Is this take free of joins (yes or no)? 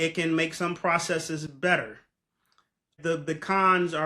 no